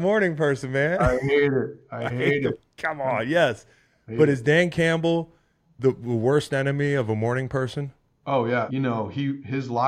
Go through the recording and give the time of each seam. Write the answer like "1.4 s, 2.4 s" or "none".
8.7 s